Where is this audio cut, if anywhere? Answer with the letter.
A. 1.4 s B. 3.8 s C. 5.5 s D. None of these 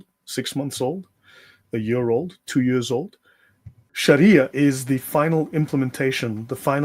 B